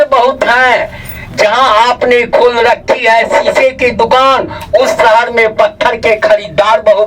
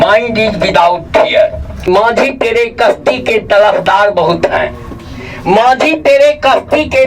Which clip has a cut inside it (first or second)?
second